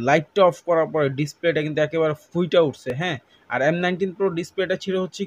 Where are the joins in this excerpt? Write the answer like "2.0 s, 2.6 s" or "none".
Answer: none